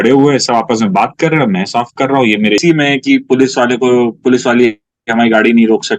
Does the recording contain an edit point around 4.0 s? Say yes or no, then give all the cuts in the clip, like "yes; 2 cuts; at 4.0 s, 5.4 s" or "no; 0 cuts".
no; 1 cut; at 2.6 s